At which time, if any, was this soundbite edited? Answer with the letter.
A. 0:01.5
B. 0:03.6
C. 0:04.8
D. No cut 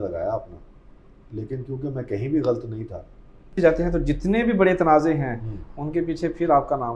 B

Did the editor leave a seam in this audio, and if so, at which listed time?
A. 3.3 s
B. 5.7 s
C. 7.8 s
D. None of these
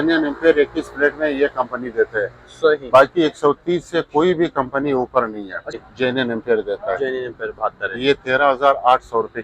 B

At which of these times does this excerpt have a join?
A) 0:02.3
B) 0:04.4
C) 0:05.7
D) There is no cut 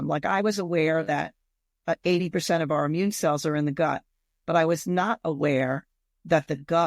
D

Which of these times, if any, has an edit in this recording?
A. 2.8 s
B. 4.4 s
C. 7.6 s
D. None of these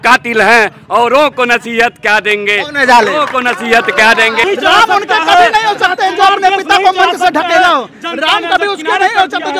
B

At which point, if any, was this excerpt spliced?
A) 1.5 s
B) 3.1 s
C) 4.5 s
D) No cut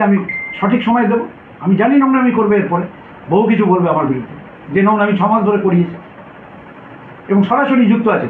D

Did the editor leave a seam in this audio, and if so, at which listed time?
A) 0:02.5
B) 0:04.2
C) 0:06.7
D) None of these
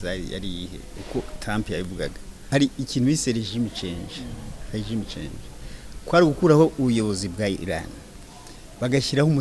A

